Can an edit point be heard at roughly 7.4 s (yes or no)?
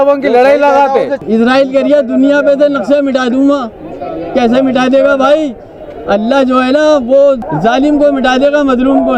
yes